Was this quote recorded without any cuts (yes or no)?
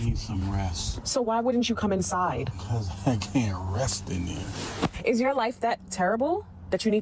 no